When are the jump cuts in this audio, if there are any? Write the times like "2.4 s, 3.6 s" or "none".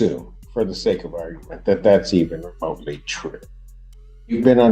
none